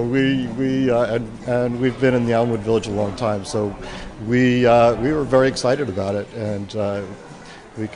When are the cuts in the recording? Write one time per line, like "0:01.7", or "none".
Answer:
none